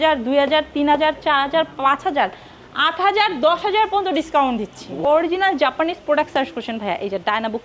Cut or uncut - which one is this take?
cut